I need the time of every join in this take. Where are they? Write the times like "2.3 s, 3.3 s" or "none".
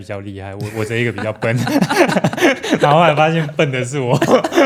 none